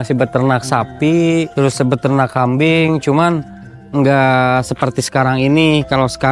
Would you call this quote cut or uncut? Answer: cut